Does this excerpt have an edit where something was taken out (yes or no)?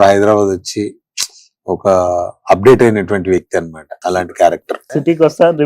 yes